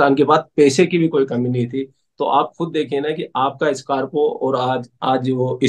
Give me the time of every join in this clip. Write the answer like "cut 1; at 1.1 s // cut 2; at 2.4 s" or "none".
none